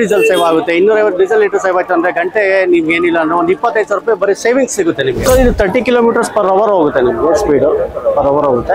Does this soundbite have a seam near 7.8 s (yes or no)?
no